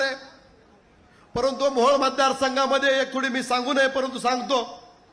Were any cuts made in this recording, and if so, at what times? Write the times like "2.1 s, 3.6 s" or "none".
none